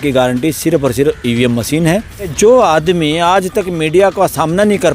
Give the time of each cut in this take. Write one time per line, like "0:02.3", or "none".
0:02.3